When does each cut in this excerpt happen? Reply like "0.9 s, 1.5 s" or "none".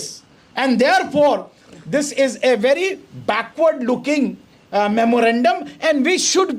none